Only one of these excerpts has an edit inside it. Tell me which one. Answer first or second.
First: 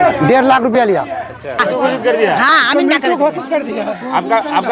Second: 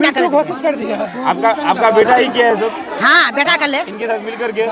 first